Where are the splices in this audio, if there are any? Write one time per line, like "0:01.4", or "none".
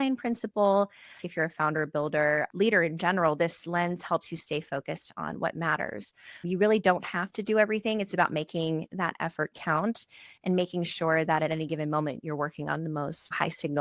0:01.2

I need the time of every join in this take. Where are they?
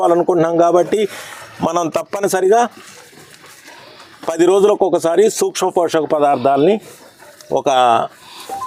none

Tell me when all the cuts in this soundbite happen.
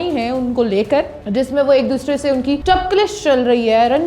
0:02.6

